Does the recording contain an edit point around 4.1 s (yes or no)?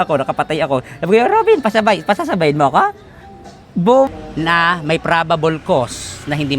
yes